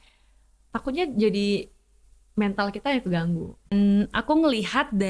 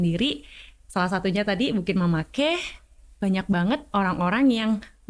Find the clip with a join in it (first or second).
first